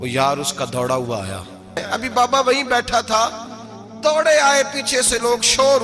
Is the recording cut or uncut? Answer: cut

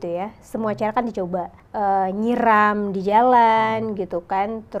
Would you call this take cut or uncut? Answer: cut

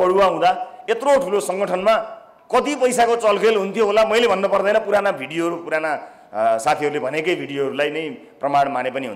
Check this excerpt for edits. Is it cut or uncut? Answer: uncut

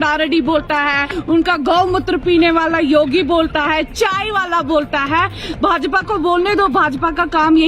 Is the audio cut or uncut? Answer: cut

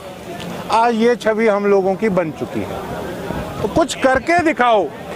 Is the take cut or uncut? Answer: uncut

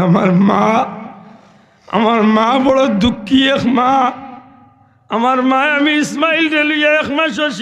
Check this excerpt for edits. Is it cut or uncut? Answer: uncut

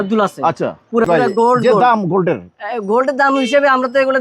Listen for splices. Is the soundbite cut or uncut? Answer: cut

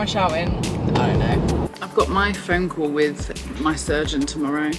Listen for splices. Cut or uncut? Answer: cut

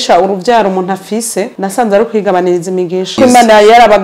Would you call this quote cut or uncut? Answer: cut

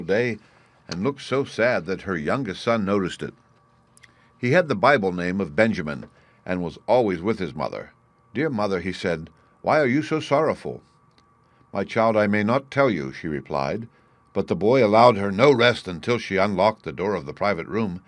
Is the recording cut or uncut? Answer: cut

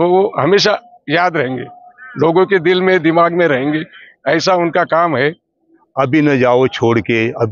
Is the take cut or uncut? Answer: cut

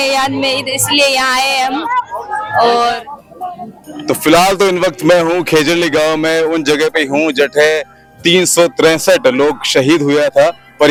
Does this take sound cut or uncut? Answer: uncut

